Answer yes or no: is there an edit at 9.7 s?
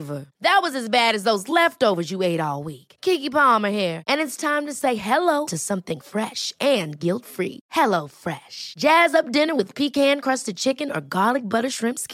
no